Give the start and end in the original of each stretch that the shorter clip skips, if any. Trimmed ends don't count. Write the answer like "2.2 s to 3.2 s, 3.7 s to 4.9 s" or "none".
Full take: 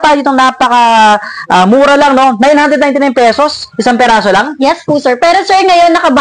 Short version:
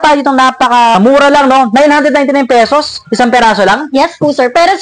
1.0 s to 1.6 s